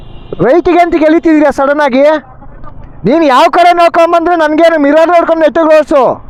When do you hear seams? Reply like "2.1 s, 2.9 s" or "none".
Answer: none